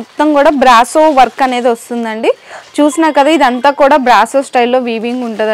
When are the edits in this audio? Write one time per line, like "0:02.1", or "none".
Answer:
none